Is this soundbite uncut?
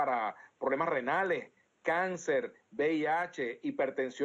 no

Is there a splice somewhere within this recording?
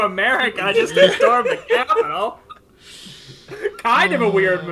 no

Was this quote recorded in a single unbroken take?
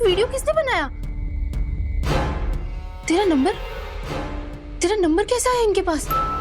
yes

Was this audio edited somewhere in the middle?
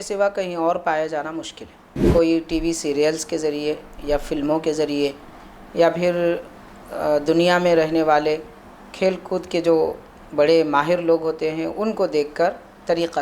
yes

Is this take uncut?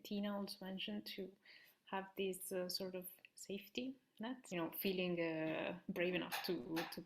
no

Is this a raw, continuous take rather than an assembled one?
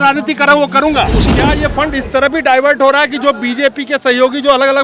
no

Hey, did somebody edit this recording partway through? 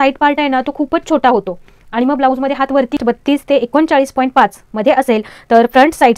yes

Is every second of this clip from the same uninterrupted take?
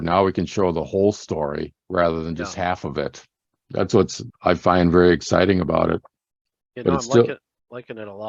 no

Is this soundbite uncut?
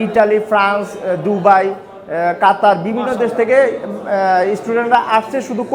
yes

